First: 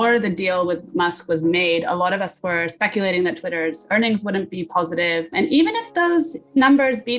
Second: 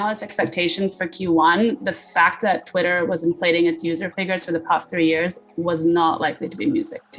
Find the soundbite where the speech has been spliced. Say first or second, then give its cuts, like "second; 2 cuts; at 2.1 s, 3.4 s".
first; 1 cut; at 5.3 s